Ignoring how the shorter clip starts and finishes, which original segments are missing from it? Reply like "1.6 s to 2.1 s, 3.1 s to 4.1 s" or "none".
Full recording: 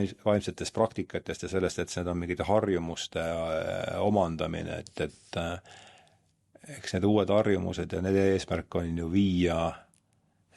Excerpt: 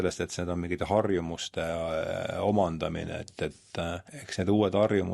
5.7 s to 6.7 s